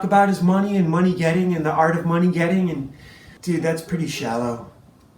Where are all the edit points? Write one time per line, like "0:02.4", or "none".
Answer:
0:03.3